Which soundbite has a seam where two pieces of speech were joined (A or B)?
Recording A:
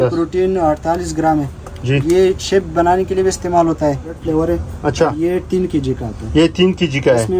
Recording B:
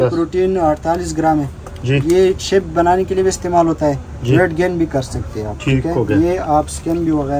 A